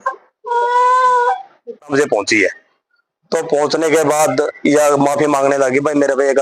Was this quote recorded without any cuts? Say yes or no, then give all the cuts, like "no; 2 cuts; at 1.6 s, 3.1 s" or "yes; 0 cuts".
no; 1 cut; at 1.9 s